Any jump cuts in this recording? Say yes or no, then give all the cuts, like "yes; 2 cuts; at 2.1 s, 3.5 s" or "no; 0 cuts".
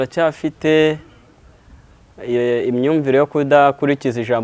no; 0 cuts